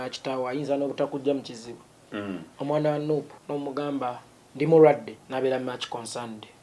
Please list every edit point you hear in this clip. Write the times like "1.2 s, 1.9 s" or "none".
2.0 s, 3.4 s, 5.2 s